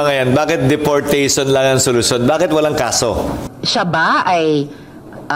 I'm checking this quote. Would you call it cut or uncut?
cut